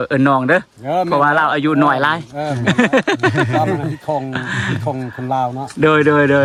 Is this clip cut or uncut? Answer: uncut